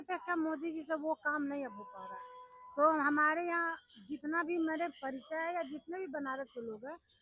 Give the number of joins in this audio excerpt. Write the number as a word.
zero